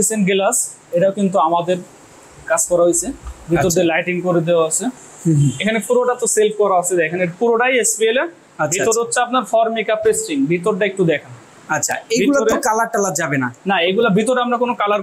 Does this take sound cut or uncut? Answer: uncut